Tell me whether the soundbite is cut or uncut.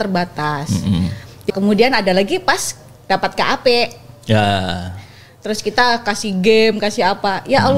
cut